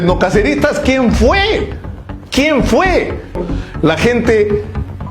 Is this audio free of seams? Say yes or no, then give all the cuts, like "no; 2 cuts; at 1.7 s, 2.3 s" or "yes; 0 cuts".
no; 1 cut; at 3.4 s